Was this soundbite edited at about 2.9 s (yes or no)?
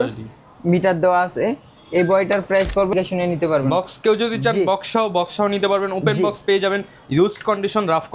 yes